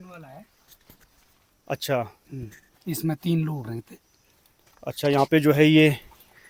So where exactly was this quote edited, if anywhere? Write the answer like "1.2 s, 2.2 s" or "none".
none